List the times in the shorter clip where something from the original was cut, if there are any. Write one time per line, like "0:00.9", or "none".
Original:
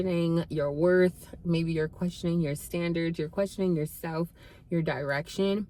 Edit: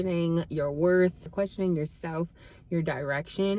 0:01.3